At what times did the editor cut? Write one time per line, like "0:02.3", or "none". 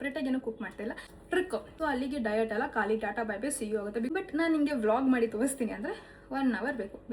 0:01.2
0:04.1